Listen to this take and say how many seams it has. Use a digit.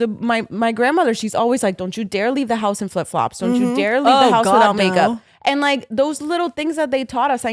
0